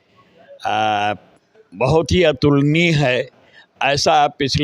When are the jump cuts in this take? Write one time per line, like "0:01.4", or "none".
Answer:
none